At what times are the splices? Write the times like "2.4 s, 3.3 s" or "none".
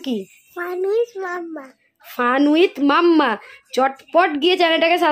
none